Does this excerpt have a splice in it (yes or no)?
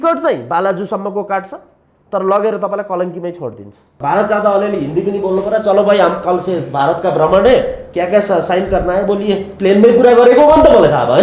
yes